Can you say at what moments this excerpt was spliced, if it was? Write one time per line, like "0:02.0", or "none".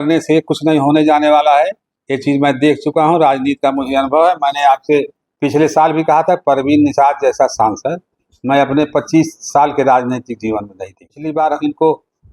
0:11.2